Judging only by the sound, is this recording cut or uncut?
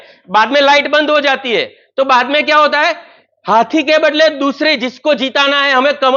uncut